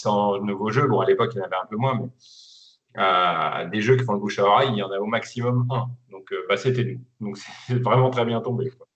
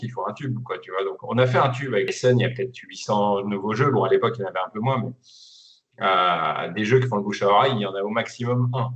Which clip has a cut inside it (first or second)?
second